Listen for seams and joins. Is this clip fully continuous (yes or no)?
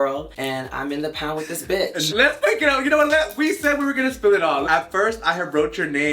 no